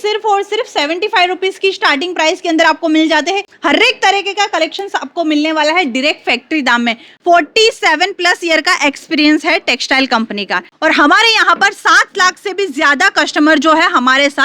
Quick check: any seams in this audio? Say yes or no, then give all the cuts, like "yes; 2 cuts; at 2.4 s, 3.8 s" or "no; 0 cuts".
yes; 3 cuts; at 3.5 s, 7.1 s, 10.7 s